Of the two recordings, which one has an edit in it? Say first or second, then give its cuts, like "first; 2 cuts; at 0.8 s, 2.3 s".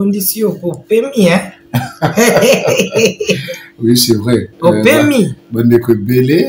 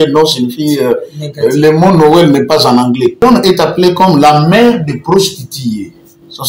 second; 1 cut; at 3.2 s